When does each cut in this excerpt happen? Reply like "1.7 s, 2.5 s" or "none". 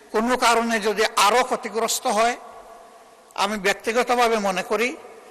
none